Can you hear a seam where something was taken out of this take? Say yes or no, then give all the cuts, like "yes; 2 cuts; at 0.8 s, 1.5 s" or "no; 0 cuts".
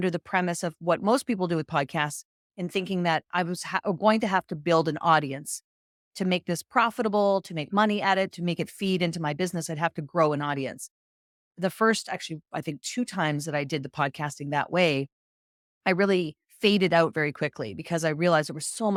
no; 0 cuts